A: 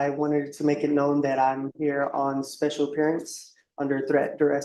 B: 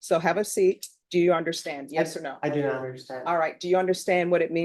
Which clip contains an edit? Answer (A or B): B